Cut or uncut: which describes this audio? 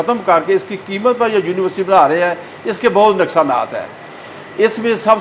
uncut